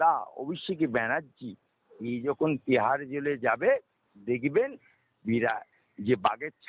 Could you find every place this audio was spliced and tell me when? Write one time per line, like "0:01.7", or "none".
none